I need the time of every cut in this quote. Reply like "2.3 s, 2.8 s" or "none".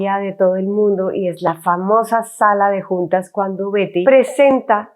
4.0 s